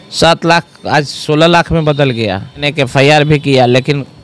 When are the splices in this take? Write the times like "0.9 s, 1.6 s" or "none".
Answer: 2.7 s

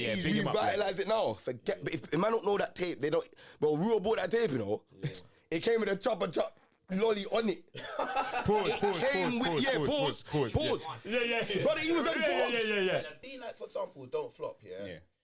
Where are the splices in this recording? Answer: 13.2 s

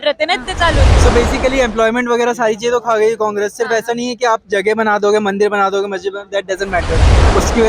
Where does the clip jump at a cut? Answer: 0.9 s

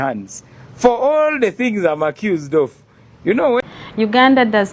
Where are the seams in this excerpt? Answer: 3.6 s

